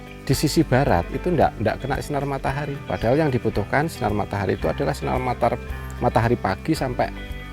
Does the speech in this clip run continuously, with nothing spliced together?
yes; 0 cuts

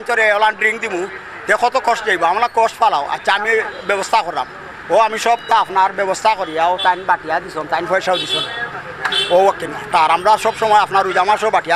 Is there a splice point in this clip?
no; 0 cuts

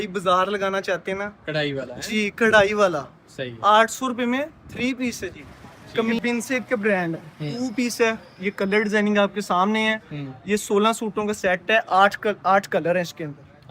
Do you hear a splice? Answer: yes; 1 cut; at 6.2 s

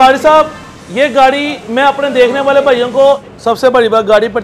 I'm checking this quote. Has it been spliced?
yes; 1 cut; at 3.3 s

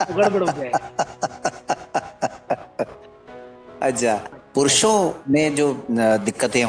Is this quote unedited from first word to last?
no; 1 cut; at 4.3 s

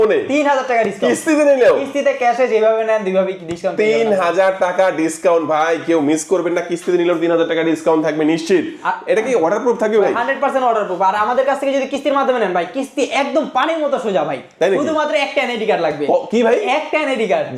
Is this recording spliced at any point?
no; 0 cuts

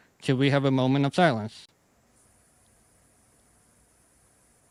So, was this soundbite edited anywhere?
no; 0 cuts

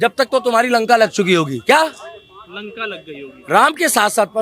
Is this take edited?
no; 0 cuts

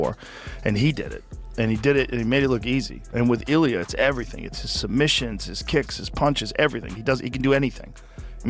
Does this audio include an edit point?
yes; 1 cut; at 3.0 s

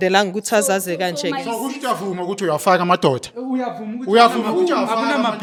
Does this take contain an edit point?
no; 0 cuts

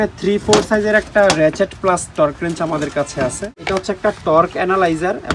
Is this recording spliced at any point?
yes; 1 cut; at 3.6 s

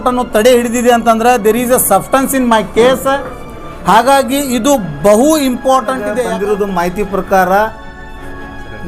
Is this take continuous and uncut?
no; 1 cut; at 6.2 s

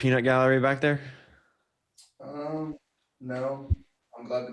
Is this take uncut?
yes; 0 cuts

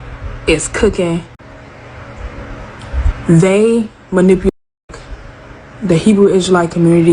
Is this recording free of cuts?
yes; 0 cuts

